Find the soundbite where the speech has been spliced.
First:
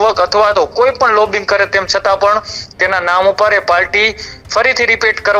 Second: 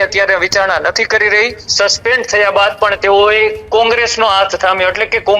second; 1 cut; at 1.6 s

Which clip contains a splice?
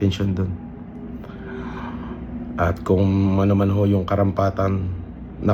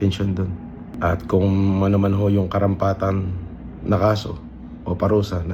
second; 1 cut; at 0.9 s

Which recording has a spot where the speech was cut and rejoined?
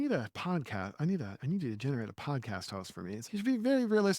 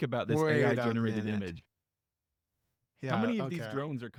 first; 1 cut; at 3.2 s

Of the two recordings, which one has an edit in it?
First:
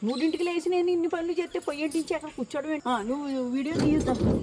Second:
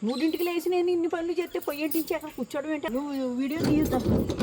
second; 1 cut; at 2.8 s

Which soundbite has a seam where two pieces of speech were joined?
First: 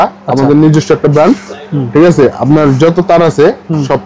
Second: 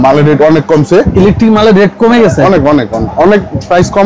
second; 2 cuts; at 1.1 s, 3.1 s

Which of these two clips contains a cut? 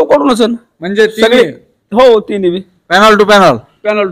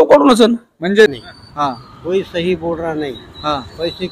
second; 1 cut; at 1.1 s

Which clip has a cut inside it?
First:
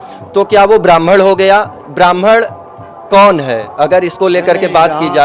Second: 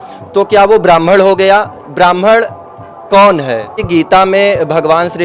second; 1 cut; at 3.7 s

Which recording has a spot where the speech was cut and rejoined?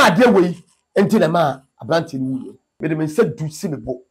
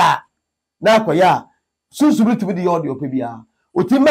first; 1 cut; at 2.8 s

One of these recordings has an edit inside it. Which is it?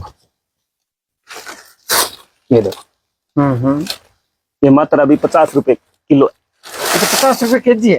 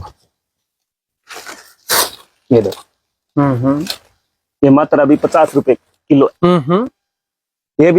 second; 1 cut; at 6.4 s

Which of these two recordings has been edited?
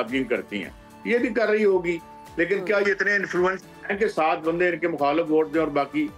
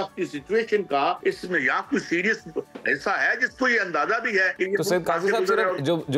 second; 2 cuts; at 1.2 s, 4.5 s

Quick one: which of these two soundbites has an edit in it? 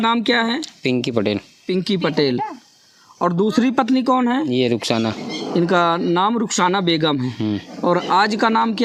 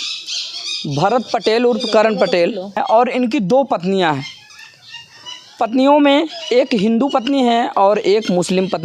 second; 1 cut; at 2.8 s

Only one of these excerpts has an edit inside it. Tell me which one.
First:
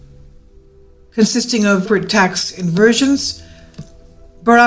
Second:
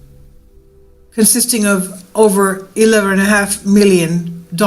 second; 1 cut; at 1.8 s

